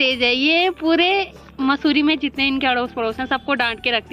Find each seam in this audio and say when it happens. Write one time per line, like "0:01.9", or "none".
none